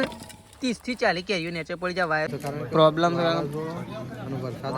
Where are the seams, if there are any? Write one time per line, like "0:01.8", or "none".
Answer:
0:02.3